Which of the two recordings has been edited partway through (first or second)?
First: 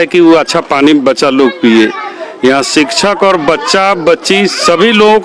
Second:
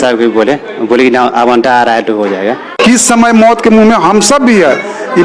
second